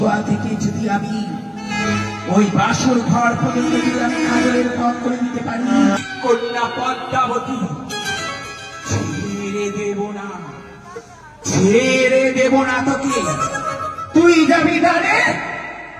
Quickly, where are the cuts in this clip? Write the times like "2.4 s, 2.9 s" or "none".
6.0 s